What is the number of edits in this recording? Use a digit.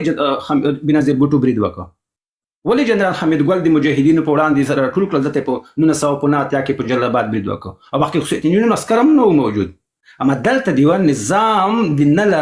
0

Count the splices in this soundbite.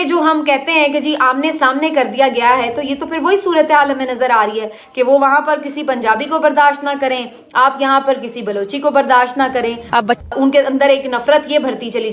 1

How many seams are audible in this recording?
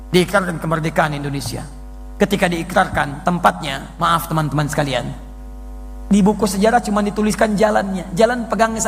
0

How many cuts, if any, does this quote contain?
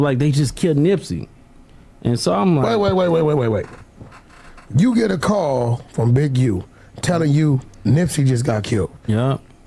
0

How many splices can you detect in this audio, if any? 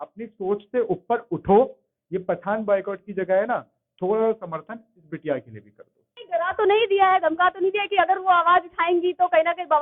1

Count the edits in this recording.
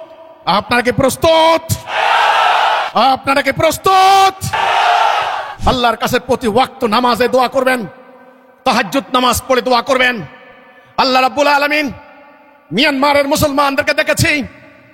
1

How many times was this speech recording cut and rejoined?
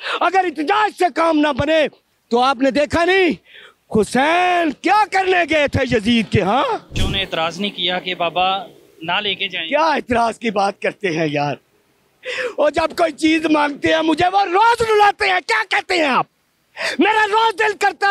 1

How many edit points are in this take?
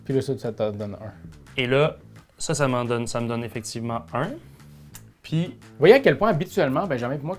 0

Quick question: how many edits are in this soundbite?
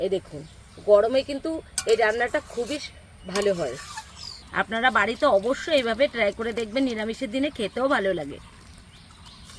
1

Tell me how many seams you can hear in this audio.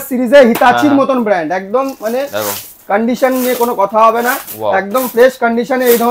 0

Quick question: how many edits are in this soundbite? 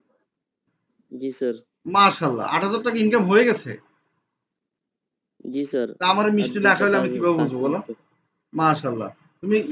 0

